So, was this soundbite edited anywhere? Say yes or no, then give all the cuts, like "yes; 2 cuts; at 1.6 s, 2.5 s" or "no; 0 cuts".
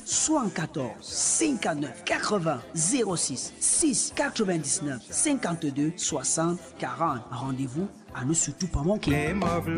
no; 0 cuts